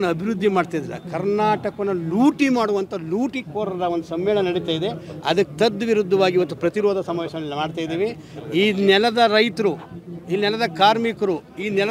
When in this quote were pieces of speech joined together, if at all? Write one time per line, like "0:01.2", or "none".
none